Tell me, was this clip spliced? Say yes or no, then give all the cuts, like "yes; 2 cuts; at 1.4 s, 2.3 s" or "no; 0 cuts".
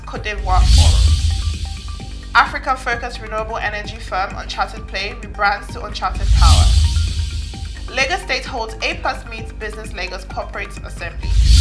no; 0 cuts